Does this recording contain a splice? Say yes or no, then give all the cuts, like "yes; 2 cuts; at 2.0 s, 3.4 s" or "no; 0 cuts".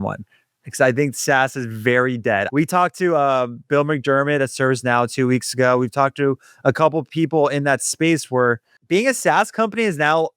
yes; 2 cuts; at 2.5 s, 8.7 s